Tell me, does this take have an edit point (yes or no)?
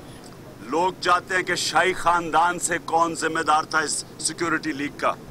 no